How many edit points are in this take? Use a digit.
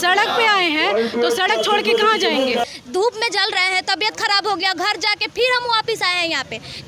1